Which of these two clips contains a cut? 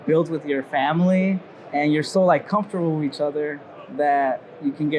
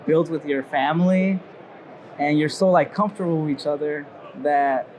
first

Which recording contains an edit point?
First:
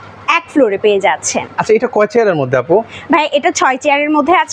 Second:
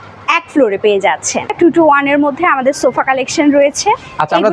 second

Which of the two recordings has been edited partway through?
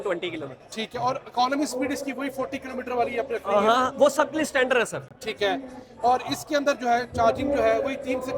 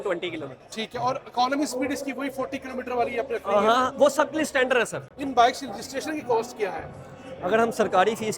second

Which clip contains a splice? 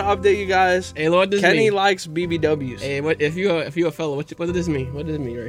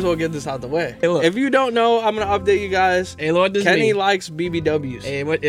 second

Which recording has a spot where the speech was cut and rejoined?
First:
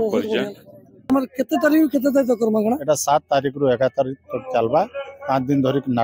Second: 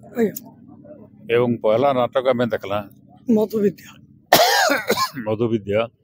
first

